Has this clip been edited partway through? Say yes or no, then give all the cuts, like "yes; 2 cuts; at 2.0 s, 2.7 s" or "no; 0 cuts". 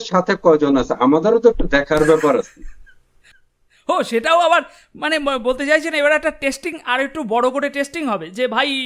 no; 0 cuts